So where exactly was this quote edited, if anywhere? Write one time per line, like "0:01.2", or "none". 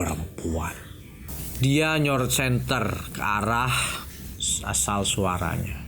0:01.2